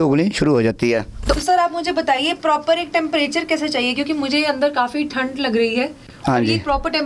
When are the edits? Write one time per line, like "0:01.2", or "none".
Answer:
0:01.4